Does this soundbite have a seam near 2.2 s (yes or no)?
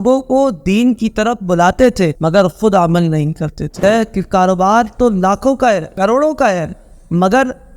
no